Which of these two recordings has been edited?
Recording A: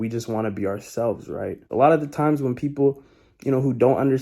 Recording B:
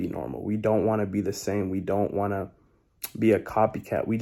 A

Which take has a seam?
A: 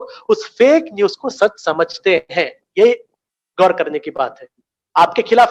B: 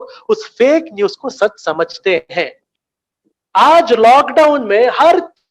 B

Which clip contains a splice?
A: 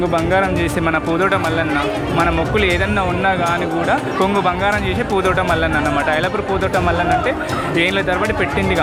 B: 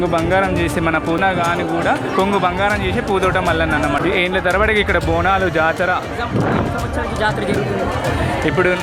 B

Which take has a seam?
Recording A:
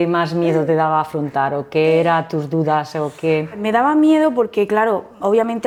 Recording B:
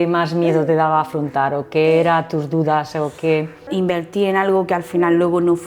B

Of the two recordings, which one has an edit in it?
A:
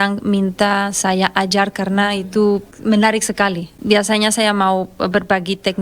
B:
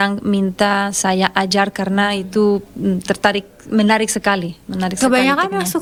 A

